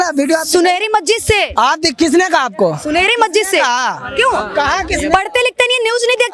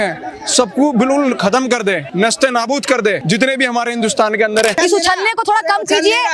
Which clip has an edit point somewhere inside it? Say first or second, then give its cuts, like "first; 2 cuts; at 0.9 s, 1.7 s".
second; 3 cuts; at 2.1 s, 3.2 s, 4.8 s